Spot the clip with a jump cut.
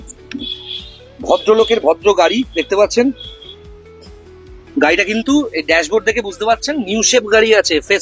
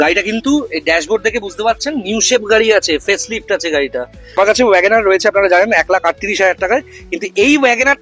second; 1 cut; at 4.4 s

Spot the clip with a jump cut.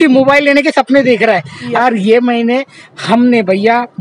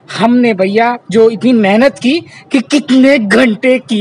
first; 1 cut; at 1.8 s

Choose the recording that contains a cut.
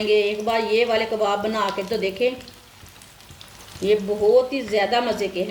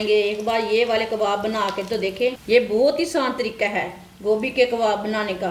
second; 1 cut; at 2.4 s

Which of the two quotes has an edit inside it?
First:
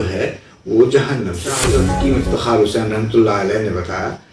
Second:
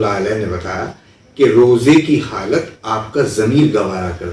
first; 1 cut; at 1.7 s

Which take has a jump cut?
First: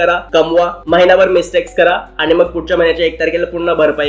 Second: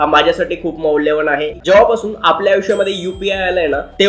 second; 1 cut; at 1.6 s

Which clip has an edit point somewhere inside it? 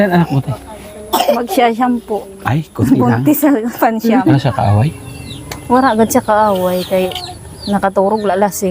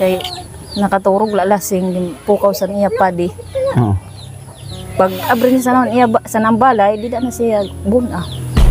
first; 1 cut; at 4.4 s

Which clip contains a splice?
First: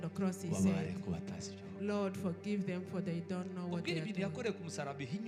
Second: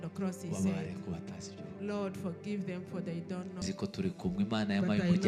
second; 1 cut; at 3.6 s

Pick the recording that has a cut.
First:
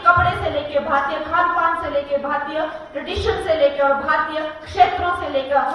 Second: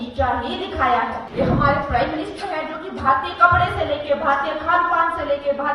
second; 1 cut; at 1.2 s

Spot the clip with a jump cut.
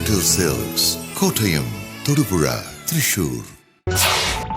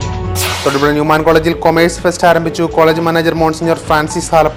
first; 1 cut; at 3.2 s

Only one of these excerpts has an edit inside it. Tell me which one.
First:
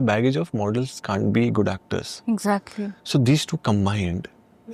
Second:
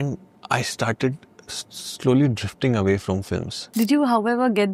second; 1 cut; at 3.6 s

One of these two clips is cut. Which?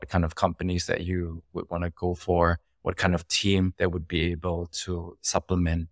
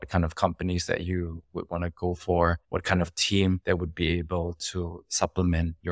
second; 1 cut; at 2.6 s

